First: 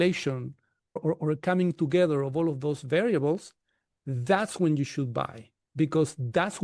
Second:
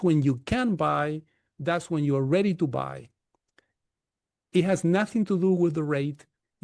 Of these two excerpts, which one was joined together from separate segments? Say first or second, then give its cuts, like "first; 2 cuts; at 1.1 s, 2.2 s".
first; 1 cut; at 1.0 s